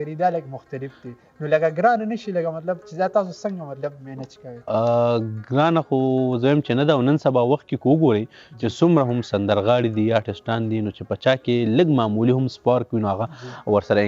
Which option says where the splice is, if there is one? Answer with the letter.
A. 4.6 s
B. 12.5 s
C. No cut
C